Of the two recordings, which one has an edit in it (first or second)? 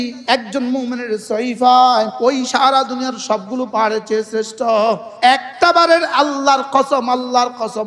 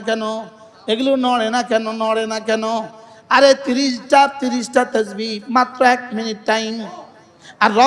first